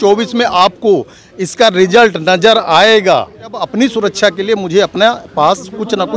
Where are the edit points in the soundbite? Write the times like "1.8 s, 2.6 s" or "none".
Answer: 3.6 s